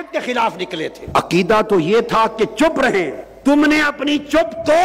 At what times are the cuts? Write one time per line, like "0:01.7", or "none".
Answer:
0:01.0
0:03.2